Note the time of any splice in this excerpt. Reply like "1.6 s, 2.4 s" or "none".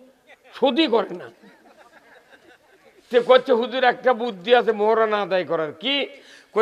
none